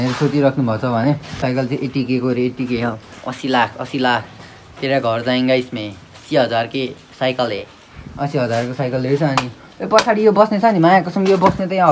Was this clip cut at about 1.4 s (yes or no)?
yes